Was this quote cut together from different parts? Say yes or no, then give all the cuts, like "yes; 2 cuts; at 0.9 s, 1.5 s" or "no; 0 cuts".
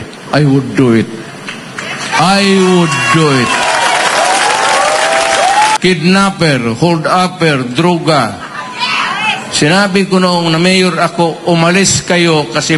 yes; 1 cut; at 5.8 s